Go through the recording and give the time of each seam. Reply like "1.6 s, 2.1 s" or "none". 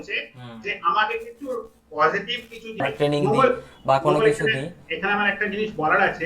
2.8 s